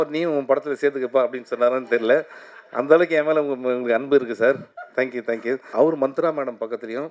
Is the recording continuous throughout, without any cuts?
no; 1 cut; at 5.7 s

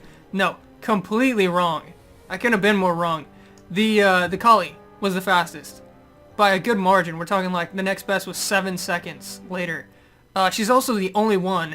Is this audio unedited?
no; 1 cut; at 4.7 s

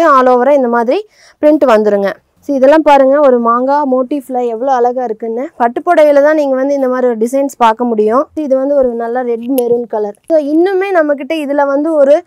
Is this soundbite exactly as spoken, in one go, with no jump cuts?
no; 3 cuts; at 2.3 s, 8.4 s, 10.2 s

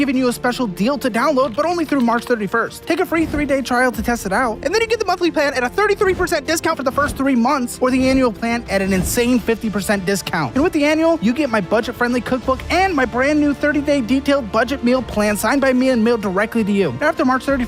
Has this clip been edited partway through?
no; 0 cuts

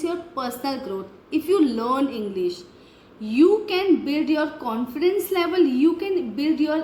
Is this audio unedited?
yes; 0 cuts

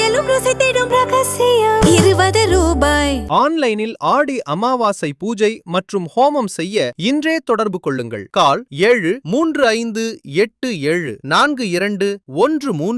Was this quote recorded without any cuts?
yes; 0 cuts

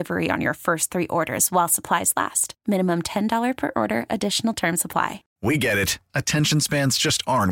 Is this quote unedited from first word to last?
no; 1 cut; at 5.3 s

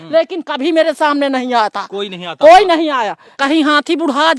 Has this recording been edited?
yes; 1 cut; at 3.2 s

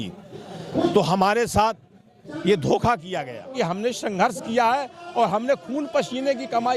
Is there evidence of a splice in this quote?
yes; 1 cut; at 3.6 s

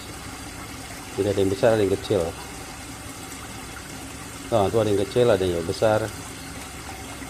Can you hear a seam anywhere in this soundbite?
no; 0 cuts

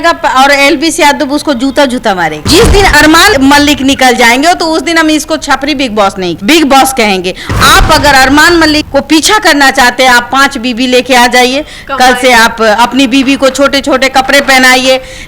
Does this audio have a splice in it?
yes; 2 cuts; at 2.4 s, 7.5 s

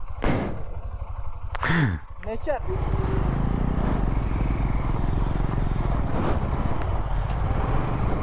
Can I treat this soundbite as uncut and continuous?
no; 1 cut; at 2.6 s

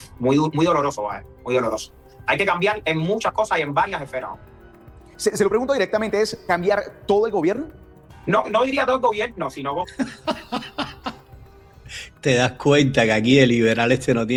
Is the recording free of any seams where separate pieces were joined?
yes; 0 cuts

